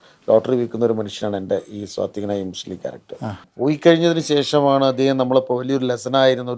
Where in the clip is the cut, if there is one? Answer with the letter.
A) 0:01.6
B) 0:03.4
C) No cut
B